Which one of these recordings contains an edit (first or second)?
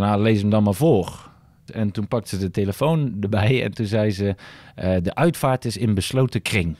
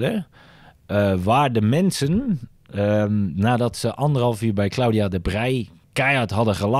first